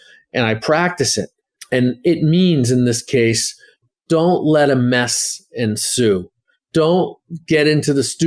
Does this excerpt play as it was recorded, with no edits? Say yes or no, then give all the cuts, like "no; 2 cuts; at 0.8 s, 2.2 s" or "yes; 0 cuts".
no; 1 cut; at 3.8 s